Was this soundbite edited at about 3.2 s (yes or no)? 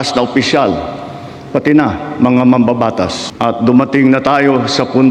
yes